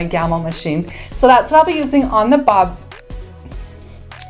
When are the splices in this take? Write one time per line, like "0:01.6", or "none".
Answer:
none